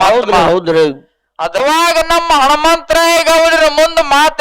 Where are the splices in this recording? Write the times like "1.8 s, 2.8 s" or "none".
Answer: 1.6 s